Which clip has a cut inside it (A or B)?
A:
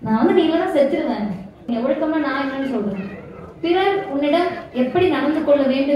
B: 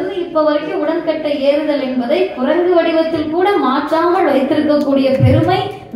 A